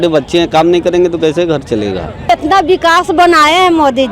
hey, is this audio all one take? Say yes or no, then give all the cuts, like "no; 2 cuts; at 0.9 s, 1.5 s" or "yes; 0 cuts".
no; 1 cut; at 2.1 s